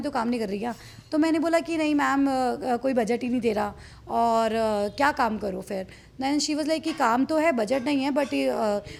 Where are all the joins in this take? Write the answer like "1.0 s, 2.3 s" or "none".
none

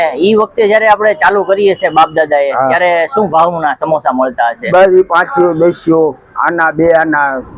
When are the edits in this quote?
none

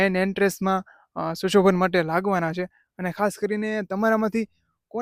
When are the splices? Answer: none

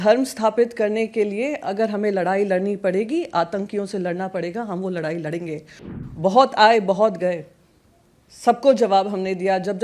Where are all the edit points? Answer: 5.8 s

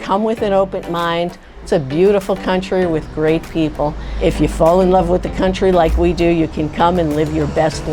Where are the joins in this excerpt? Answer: 1.5 s, 4.1 s

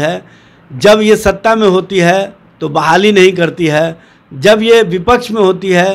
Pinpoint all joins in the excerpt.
none

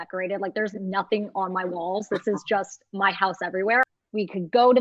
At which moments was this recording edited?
3.8 s

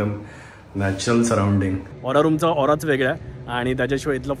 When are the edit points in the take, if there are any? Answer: 2.0 s

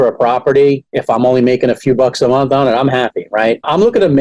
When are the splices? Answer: none

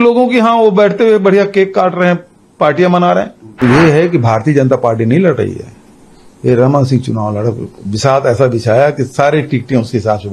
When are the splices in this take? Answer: 3.6 s

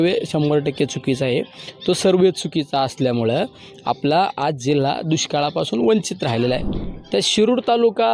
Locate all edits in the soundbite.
6.7 s

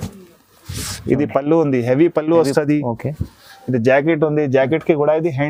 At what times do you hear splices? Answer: none

